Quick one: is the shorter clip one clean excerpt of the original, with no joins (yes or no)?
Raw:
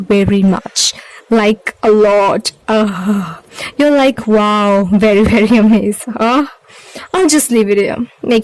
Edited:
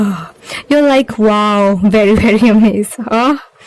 yes